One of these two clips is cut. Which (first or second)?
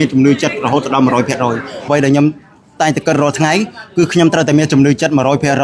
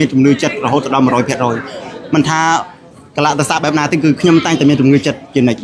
first